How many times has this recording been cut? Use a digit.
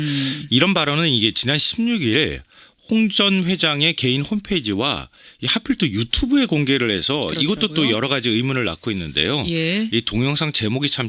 0